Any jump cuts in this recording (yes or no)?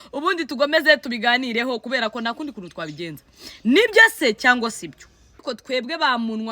yes